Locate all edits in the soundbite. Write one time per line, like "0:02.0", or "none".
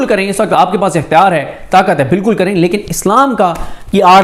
none